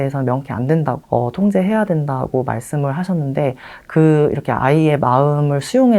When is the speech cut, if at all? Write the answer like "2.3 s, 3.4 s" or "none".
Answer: 1.0 s